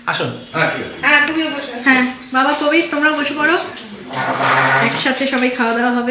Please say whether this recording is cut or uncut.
uncut